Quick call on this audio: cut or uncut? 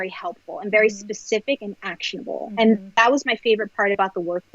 uncut